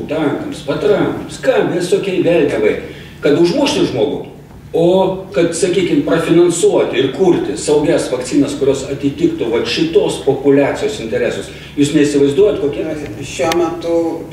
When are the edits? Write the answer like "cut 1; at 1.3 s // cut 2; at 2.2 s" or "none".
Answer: cut 1; at 12.8 s